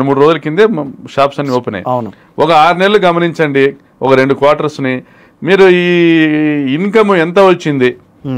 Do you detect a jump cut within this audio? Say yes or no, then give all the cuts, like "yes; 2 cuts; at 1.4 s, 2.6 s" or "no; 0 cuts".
no; 0 cuts